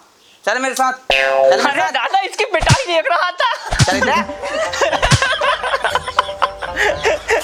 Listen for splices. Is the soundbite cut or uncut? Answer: uncut